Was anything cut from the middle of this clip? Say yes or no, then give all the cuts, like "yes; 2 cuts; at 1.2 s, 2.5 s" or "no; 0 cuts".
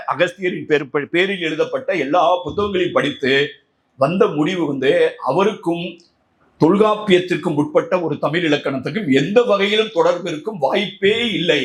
no; 0 cuts